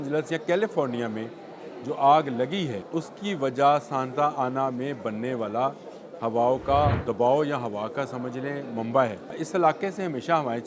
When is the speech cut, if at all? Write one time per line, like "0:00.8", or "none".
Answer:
0:02.8
0:07.0
0:09.4

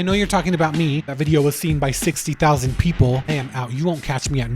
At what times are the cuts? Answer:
0:01.1
0:03.3

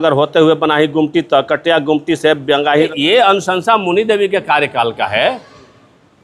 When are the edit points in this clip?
0:02.9

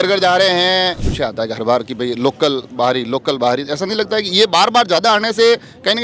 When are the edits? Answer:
0:01.1

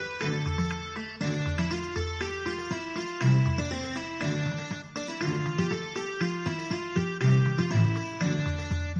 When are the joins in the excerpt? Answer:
none

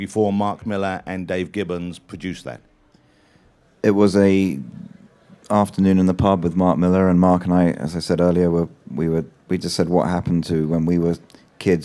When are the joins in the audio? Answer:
none

